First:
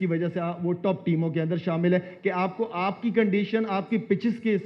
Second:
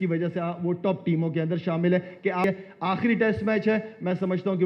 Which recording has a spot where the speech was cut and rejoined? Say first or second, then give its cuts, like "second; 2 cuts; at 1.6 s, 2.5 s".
second; 1 cut; at 2.4 s